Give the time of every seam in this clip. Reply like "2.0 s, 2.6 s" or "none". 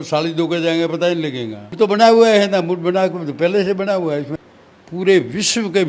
1.7 s, 4.3 s

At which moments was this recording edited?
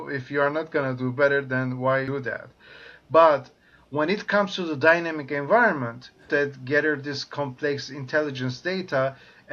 2.1 s, 6.2 s

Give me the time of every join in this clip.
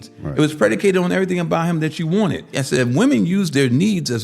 2.6 s

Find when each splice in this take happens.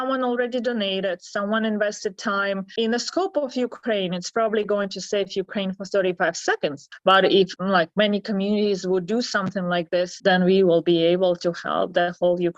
2.7 s, 7.5 s, 10.1 s

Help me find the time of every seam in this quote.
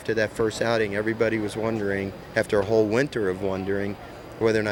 none

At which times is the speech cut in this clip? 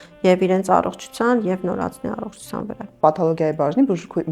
3.0 s

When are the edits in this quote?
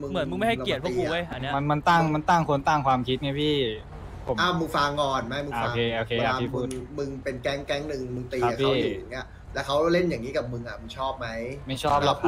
none

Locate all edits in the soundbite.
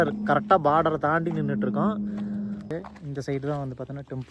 2.7 s

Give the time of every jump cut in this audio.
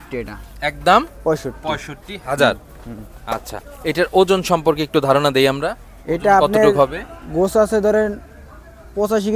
none

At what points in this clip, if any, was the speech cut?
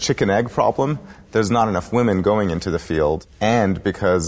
3.3 s

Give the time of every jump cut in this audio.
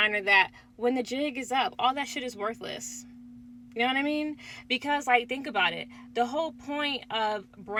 none

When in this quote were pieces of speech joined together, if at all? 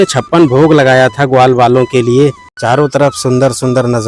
2.5 s

